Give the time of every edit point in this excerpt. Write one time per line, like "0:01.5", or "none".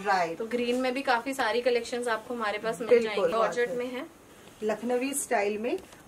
0:03.3